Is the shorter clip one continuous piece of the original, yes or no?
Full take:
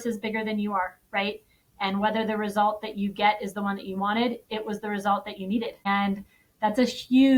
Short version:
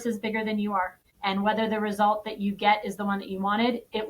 no